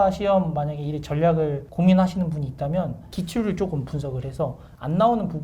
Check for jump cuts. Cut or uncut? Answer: cut